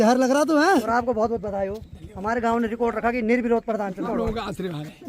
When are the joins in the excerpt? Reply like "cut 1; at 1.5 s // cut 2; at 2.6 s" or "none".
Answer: cut 1; at 0.8 s // cut 2; at 4.1 s